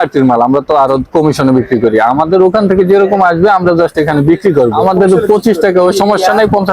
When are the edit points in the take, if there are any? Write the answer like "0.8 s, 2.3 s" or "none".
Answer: 4.8 s

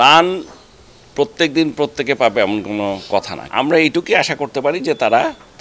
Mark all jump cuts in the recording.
3.4 s

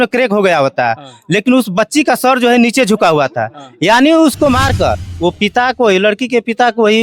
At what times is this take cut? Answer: 5.1 s

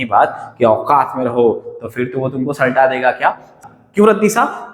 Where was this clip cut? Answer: 3.6 s

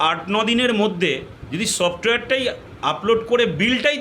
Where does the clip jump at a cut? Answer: 1.4 s

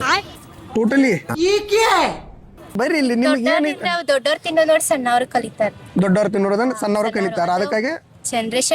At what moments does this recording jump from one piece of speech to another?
2.8 s

